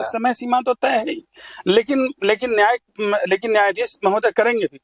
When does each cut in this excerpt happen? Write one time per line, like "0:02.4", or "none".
none